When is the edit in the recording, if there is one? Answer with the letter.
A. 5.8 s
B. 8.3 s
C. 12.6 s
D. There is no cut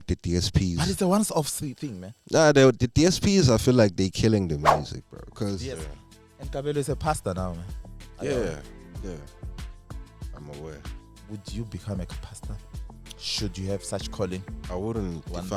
A